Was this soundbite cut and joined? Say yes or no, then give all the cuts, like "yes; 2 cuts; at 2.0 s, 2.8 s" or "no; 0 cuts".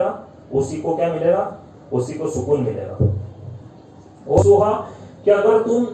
yes; 1 cut; at 4.4 s